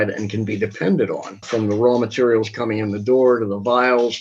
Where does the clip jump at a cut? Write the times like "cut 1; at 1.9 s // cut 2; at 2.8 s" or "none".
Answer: cut 1; at 1.3 s